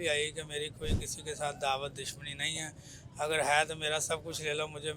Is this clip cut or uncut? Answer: uncut